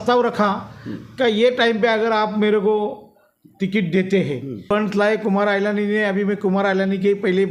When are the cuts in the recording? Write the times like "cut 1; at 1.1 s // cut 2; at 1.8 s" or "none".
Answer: cut 1; at 4.7 s